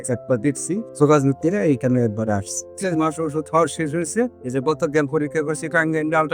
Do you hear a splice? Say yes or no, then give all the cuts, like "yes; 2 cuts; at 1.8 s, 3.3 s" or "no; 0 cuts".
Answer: yes; 2 cuts; at 0.9 s, 2.7 s